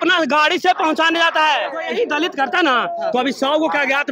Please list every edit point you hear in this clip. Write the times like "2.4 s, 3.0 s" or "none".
1.8 s